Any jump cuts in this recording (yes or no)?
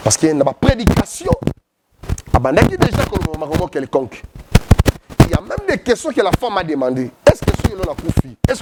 no